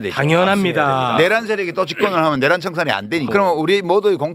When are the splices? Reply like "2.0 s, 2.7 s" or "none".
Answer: 3.3 s